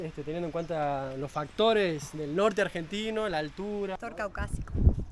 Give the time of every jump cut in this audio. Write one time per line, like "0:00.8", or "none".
0:04.0